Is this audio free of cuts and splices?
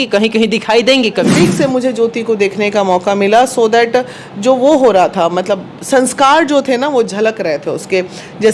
no; 1 cut; at 1.3 s

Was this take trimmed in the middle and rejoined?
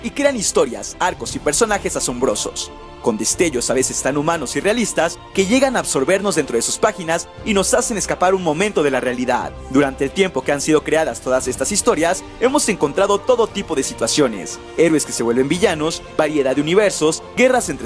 no; 0 cuts

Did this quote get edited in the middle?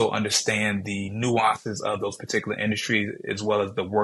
no; 0 cuts

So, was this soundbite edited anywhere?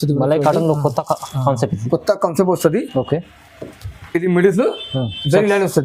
no; 0 cuts

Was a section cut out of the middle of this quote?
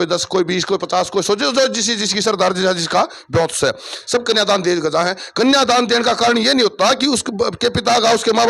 no; 0 cuts

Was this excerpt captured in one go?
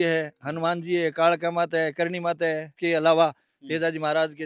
no; 1 cut; at 2.7 s

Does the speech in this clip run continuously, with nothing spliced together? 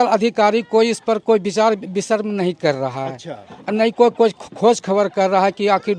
yes; 0 cuts

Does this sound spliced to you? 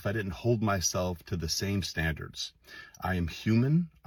no; 0 cuts

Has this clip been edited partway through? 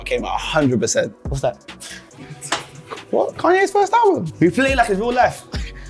yes; 1 cut; at 4.3 s

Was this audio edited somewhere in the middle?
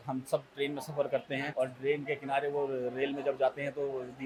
no; 0 cuts

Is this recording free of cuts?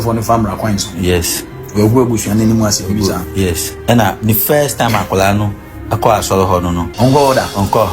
no; 1 cut; at 6.9 s

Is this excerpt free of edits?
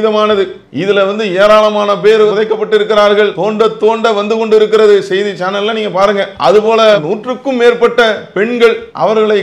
yes; 0 cuts

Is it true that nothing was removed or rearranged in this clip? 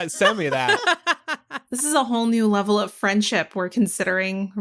no; 1 cut; at 1.8 s

